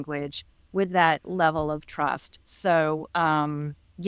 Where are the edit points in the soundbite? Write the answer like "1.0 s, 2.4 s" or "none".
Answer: none